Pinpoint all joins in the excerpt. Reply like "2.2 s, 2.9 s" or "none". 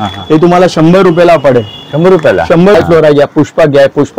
2.7 s